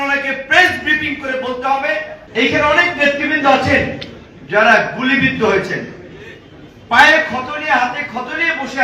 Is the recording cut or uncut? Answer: cut